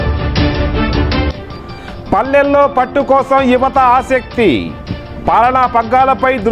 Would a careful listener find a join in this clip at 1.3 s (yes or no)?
yes